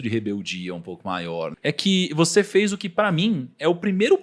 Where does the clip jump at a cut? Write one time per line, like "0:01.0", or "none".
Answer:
0:01.5